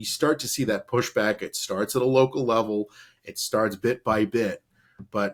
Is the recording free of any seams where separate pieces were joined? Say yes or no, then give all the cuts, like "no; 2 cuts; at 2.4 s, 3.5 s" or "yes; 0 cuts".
yes; 0 cuts